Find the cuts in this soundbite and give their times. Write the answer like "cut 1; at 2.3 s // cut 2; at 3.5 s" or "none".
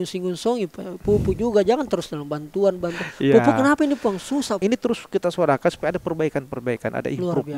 cut 1; at 4.6 s